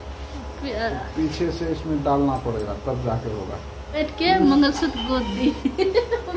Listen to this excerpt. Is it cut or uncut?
cut